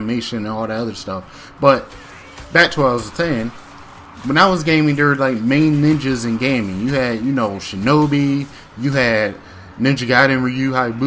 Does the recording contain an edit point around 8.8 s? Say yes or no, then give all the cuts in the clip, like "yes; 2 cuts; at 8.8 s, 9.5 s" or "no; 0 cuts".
no; 1 cut; at 7.4 s